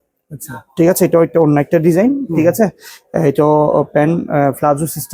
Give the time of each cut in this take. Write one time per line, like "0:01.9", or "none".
none